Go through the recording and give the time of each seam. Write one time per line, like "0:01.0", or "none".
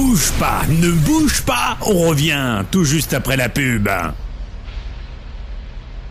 none